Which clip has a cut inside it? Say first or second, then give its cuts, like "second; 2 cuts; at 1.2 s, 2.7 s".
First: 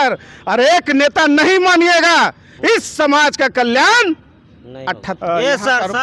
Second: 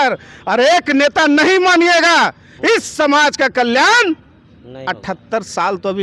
first; 1 cut; at 5.1 s